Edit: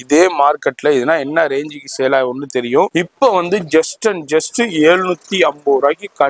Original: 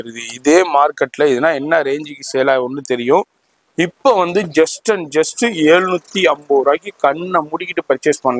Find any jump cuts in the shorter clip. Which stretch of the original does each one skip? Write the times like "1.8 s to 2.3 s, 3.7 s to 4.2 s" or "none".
3.3 s to 3.7 s